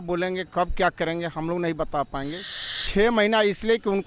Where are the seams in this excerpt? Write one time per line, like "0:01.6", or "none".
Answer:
0:02.5